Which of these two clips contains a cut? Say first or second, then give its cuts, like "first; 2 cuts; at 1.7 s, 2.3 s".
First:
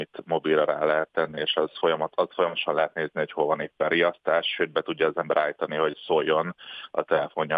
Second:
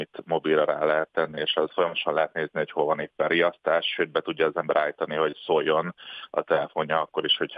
second; 1 cut; at 1.7 s